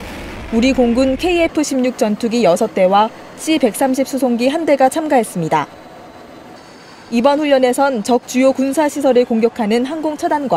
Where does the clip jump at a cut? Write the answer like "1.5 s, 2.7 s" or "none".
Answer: none